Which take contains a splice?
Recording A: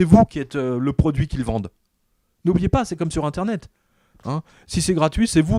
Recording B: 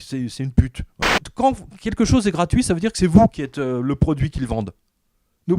B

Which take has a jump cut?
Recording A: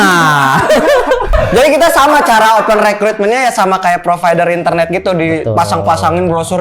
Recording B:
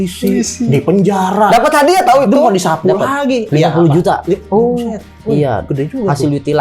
A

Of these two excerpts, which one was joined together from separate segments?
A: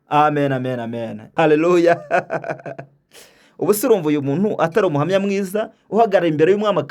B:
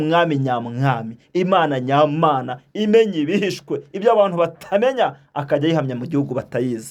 A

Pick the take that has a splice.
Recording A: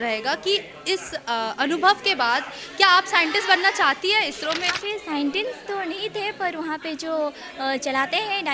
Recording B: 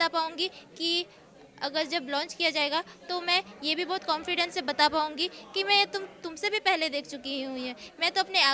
A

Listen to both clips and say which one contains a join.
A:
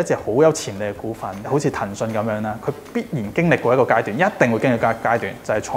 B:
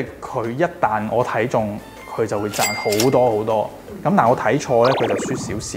A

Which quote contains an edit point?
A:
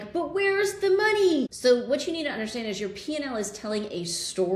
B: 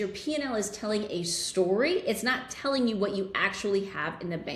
A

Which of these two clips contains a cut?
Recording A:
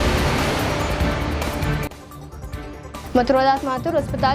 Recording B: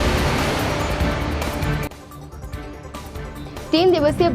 A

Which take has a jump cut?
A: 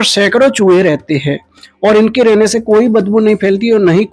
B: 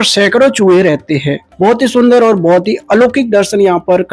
B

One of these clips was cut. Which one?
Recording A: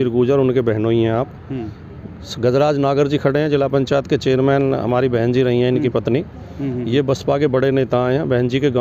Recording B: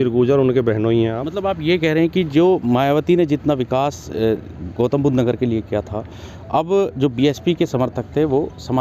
B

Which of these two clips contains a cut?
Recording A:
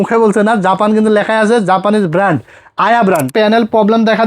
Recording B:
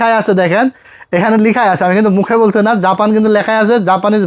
A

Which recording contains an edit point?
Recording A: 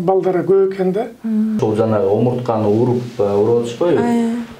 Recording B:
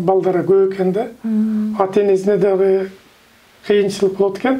A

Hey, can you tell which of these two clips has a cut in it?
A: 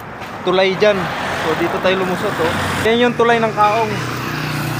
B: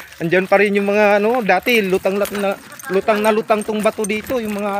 A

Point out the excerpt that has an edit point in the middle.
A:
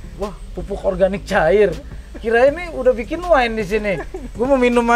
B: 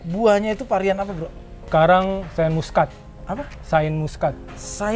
B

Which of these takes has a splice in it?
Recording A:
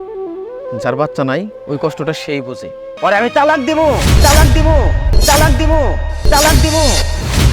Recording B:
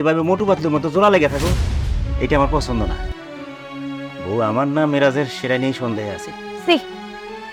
A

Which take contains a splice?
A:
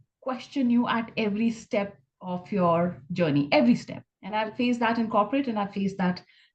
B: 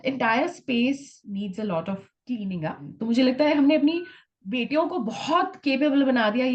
B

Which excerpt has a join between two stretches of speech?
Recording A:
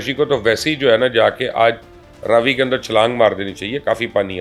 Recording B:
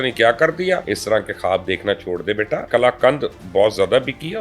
B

